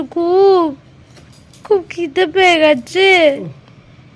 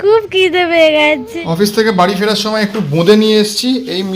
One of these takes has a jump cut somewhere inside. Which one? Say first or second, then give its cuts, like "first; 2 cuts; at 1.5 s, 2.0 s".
second; 1 cut; at 1.3 s